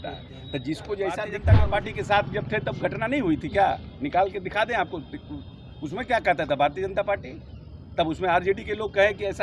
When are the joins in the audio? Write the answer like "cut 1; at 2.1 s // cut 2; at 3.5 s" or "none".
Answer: cut 1; at 1.4 s